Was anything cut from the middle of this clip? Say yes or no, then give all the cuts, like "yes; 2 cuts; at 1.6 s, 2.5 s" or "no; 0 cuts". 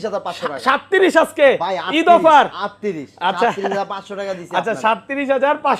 no; 0 cuts